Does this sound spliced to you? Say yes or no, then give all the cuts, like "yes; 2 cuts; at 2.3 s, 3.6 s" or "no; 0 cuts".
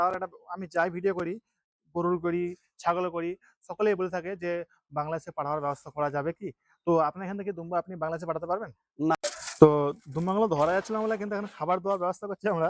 yes; 1 cut; at 9.2 s